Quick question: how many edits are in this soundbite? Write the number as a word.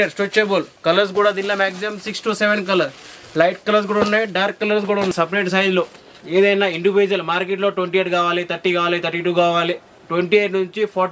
one